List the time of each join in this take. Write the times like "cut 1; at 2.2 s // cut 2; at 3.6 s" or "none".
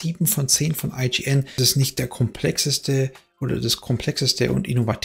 cut 1; at 1.6 s